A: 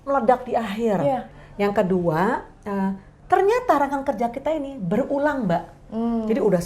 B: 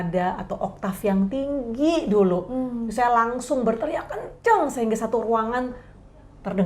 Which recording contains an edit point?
A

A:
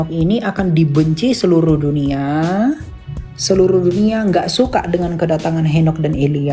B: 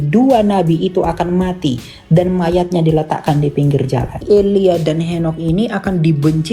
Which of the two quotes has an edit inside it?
B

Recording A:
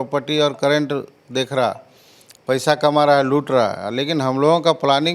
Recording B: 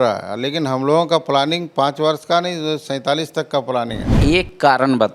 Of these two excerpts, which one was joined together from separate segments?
B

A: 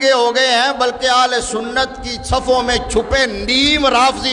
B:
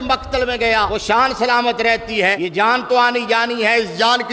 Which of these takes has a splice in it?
B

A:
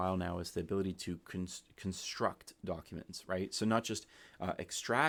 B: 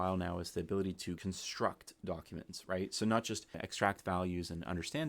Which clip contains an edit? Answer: B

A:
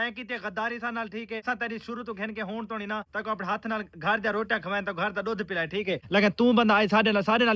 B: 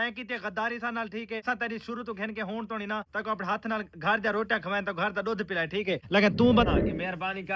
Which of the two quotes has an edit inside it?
B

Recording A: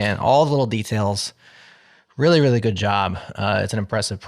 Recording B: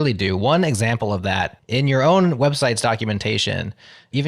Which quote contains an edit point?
B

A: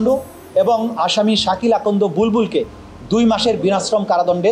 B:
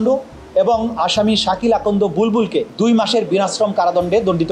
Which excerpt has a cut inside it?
B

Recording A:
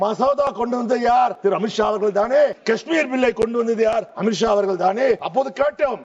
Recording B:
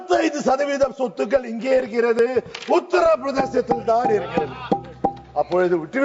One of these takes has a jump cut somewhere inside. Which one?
A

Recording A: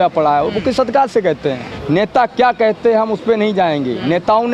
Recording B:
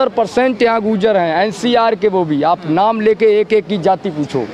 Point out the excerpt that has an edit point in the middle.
A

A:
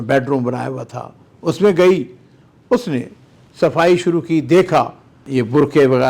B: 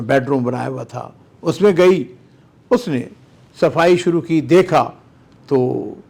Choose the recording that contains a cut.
A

